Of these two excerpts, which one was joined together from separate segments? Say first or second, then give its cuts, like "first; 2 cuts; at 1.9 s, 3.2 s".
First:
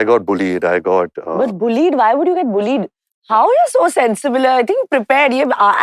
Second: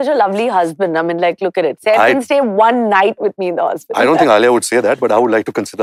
first; 1 cut; at 3.2 s